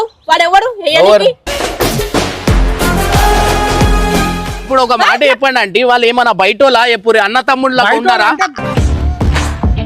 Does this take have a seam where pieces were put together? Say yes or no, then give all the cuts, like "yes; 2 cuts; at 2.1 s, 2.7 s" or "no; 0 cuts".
yes; 1 cut; at 4.6 s